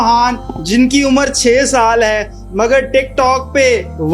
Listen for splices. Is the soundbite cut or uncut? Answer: uncut